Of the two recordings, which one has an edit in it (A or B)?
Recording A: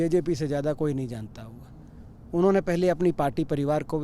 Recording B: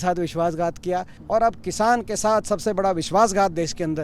B